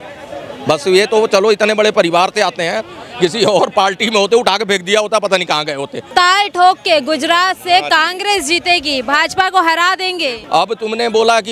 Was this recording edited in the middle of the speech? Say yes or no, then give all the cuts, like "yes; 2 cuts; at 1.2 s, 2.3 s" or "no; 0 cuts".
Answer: yes; 2 cuts; at 6.0 s, 10.3 s